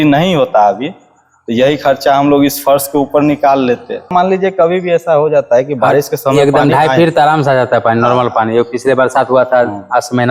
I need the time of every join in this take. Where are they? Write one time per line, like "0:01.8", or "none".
0:04.1